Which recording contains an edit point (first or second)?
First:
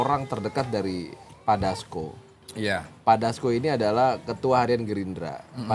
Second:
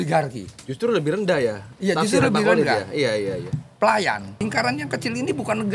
second